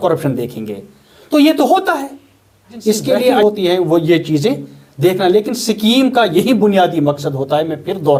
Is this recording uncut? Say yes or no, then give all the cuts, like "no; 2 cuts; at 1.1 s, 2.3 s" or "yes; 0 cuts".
yes; 0 cuts